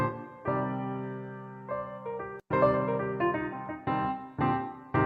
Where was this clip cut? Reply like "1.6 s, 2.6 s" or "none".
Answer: 2.4 s